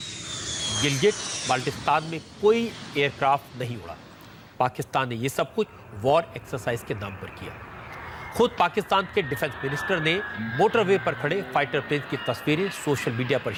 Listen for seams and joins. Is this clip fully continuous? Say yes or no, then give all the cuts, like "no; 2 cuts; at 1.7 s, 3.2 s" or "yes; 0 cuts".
yes; 0 cuts